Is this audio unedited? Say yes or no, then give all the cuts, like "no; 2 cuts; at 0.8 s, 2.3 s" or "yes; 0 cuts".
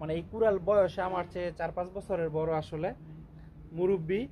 yes; 0 cuts